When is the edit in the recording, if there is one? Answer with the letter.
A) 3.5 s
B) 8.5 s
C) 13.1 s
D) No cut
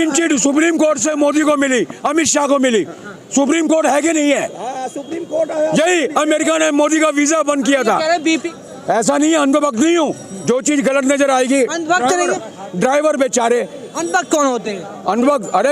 B